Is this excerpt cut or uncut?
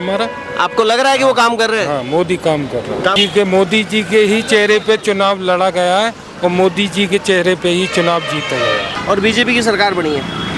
cut